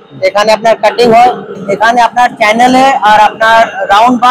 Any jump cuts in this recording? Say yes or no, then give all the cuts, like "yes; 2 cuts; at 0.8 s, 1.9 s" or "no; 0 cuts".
no; 0 cuts